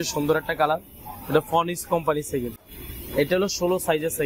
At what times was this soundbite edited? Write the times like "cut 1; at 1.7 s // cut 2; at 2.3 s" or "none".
none